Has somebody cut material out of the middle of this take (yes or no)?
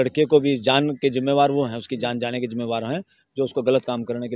no